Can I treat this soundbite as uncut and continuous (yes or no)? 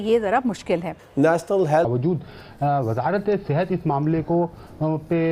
no